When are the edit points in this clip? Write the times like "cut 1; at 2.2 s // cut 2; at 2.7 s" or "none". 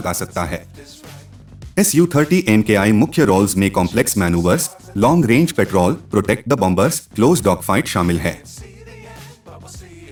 none